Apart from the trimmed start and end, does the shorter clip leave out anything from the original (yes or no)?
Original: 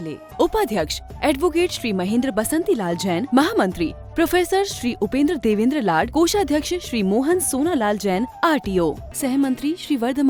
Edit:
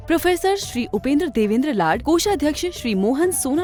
no